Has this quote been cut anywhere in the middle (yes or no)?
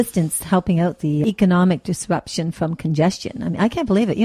yes